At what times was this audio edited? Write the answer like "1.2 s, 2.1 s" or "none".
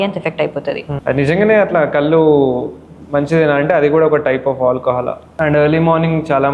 0.9 s, 5.2 s